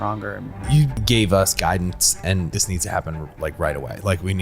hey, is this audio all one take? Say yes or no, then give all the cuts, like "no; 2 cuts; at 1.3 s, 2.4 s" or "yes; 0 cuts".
no; 2 cuts; at 0.8 s, 2.6 s